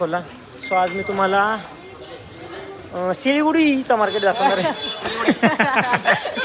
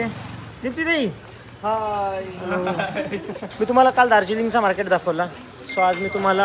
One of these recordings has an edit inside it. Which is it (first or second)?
second